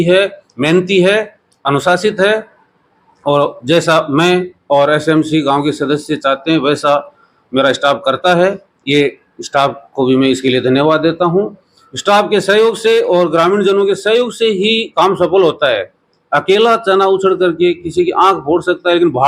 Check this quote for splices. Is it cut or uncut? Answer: uncut